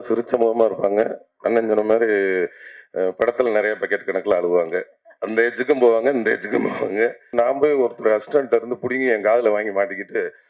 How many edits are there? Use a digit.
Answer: 1